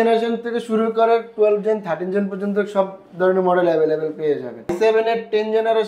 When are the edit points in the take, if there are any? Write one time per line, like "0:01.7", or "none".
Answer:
0:04.7